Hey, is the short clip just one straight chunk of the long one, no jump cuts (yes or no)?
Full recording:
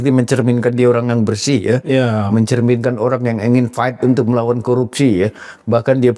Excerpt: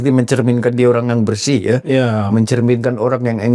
yes